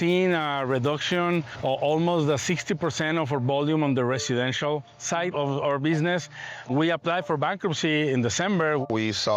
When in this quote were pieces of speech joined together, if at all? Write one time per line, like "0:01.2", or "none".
none